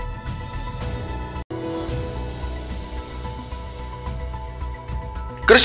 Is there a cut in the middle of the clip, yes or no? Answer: yes